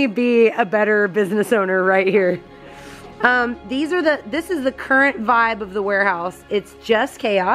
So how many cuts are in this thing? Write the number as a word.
zero